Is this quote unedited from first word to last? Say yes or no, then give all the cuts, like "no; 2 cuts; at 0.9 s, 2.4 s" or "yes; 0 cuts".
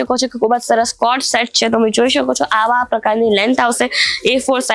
yes; 0 cuts